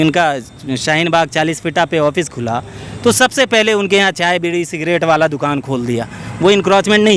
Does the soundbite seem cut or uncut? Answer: uncut